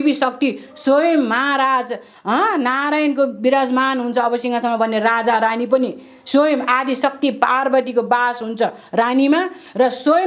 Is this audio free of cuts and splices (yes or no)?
yes